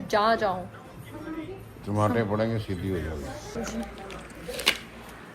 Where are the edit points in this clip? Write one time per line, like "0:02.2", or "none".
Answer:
0:03.5

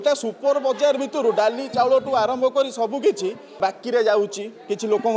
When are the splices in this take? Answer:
0:03.6

